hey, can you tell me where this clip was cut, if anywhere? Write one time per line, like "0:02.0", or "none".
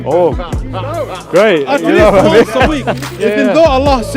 0:03.1